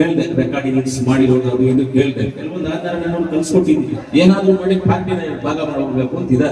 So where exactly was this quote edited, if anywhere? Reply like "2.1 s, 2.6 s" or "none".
4.0 s